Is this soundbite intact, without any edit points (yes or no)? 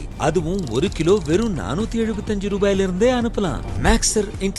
no